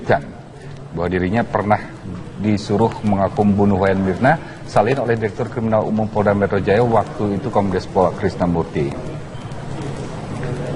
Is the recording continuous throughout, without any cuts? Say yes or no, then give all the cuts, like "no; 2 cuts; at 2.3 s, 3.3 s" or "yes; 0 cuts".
yes; 0 cuts